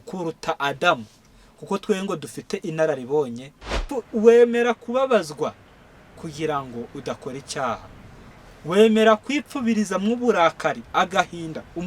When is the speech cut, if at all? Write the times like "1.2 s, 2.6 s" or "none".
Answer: 3.9 s